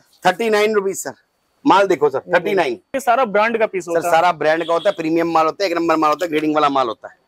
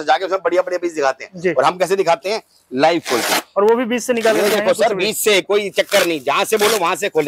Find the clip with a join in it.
first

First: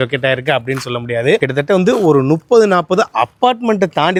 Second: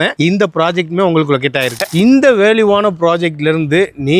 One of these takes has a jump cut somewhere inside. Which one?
second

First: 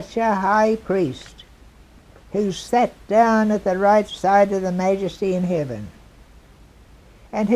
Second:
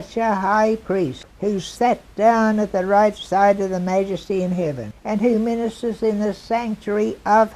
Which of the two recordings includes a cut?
second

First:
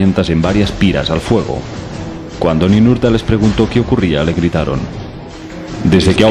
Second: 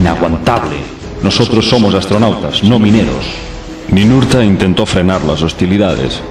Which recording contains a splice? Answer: first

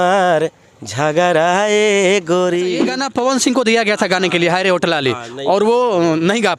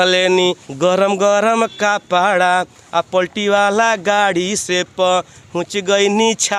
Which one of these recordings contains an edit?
first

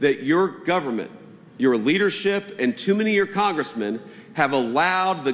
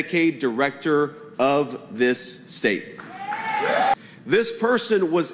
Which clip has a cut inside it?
second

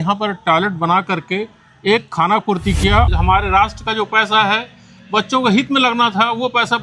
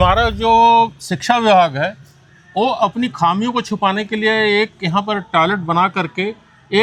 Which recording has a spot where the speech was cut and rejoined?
first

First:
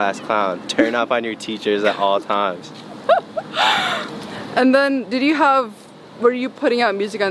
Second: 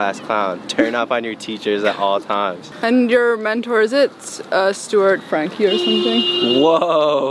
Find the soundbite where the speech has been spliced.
second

